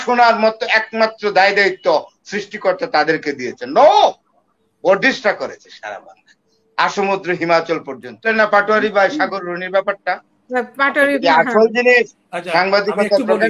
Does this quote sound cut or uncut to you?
cut